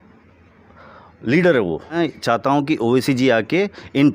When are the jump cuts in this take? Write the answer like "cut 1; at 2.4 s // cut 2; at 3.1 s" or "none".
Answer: cut 1; at 2.0 s